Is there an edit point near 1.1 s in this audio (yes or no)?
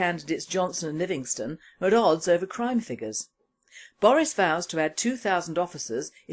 yes